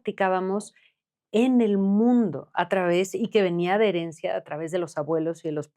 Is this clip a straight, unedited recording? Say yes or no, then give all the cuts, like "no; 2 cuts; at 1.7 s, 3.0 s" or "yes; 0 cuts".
yes; 0 cuts